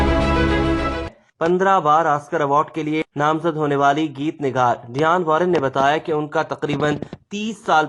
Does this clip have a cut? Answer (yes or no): yes